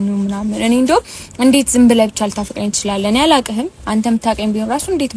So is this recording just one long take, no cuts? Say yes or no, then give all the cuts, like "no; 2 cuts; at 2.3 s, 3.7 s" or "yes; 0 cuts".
yes; 0 cuts